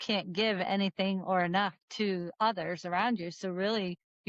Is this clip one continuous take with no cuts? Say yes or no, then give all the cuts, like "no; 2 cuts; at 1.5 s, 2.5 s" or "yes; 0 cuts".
yes; 0 cuts